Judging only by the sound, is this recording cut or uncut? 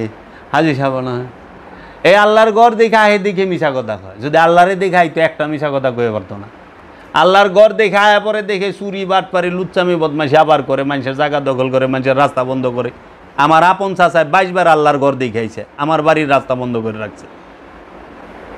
uncut